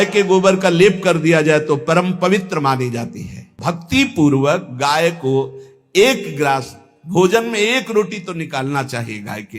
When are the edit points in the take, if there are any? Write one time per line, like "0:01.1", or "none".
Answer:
0:03.5